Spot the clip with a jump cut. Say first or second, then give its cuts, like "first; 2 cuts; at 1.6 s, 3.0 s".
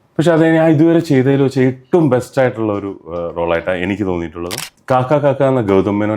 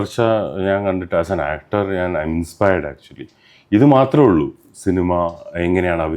first; 1 cut; at 4.7 s